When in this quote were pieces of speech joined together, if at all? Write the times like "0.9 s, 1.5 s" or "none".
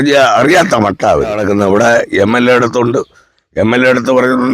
1.4 s